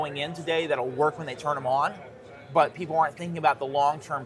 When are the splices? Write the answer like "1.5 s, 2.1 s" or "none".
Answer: none